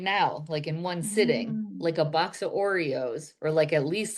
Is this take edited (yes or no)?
no